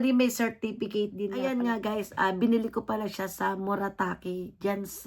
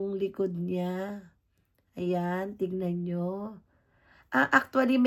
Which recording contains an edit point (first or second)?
first